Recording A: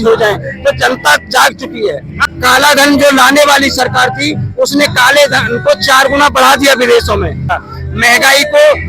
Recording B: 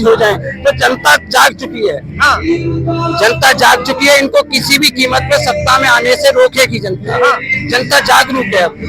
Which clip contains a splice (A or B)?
A